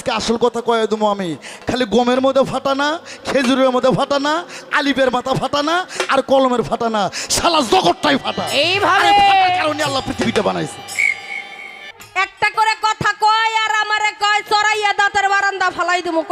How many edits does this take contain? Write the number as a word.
one